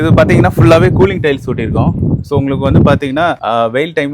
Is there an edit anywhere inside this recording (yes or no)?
no